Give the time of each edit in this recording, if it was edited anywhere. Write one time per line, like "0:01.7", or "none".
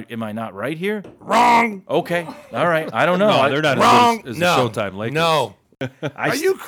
0:05.8